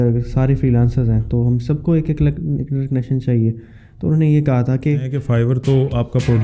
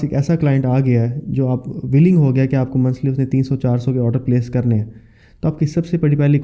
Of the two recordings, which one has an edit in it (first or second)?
first